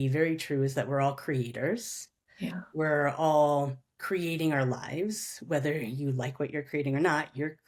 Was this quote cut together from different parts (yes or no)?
no